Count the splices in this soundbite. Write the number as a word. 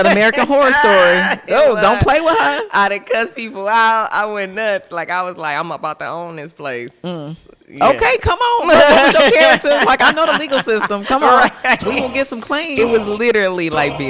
zero